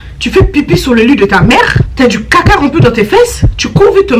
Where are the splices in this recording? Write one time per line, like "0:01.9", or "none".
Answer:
0:01.8